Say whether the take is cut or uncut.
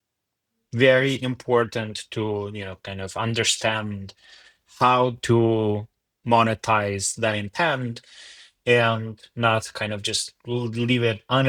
uncut